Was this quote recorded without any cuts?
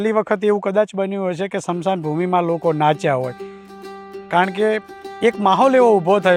yes; 0 cuts

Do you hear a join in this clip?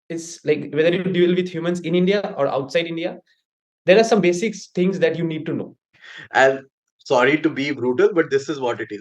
yes; 1 cut; at 6.1 s

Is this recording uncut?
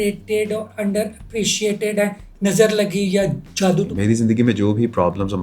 no; 2 cuts; at 2.2 s, 3.9 s

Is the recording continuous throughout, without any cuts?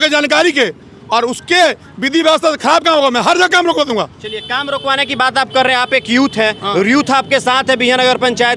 yes; 0 cuts

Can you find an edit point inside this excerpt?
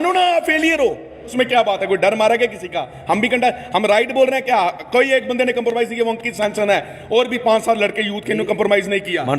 yes; 1 cut; at 1.3 s

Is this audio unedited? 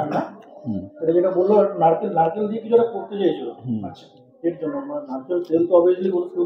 yes; 0 cuts

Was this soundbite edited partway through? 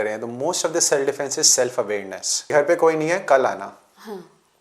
yes; 1 cut; at 2.5 s

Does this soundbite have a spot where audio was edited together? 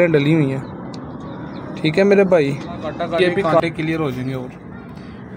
yes; 1 cut; at 3.1 s

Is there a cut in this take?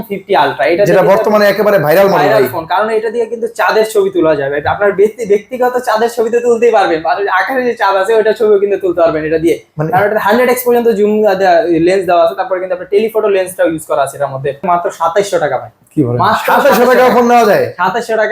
yes; 1 cut; at 14.6 s

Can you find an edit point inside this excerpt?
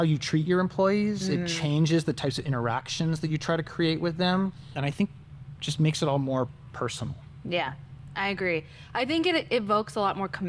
yes; 1 cut; at 4.7 s

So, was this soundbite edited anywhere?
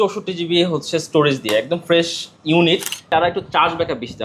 yes; 1 cut; at 3.0 s

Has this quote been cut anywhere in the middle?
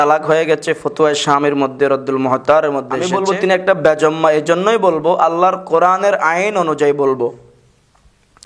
yes; 1 cut; at 3.0 s

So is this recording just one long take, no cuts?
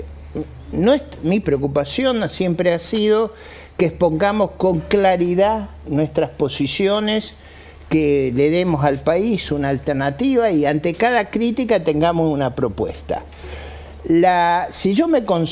yes; 0 cuts

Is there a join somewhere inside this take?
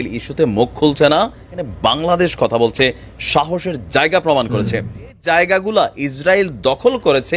yes; 2 cuts; at 1.6 s, 5.2 s

